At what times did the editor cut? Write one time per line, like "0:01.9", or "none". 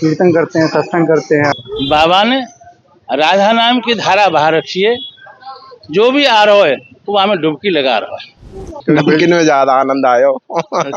0:01.6
0:08.8